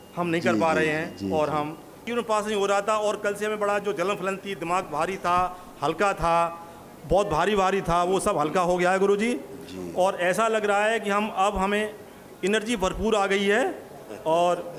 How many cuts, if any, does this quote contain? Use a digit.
1